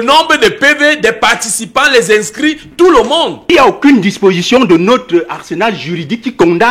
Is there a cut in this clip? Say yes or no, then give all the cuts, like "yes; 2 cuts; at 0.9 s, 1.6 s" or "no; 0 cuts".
yes; 1 cut; at 3.5 s